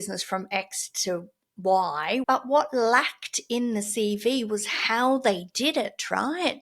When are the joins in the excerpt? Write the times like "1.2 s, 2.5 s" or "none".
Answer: 2.2 s